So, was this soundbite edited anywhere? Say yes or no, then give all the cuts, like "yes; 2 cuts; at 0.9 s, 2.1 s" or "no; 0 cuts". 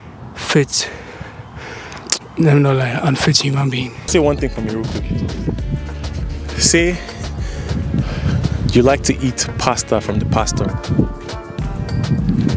yes; 1 cut; at 4.0 s